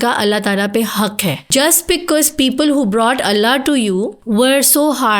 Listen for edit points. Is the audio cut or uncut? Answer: cut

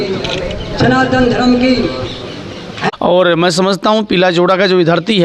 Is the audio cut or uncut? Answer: cut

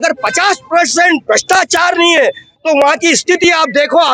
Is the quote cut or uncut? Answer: uncut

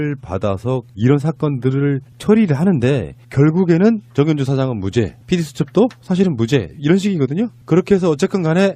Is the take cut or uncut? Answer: uncut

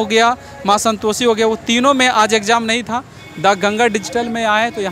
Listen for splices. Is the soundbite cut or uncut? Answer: uncut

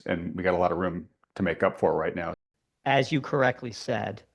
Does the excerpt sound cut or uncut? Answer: cut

